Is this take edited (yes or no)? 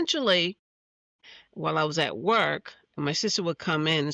yes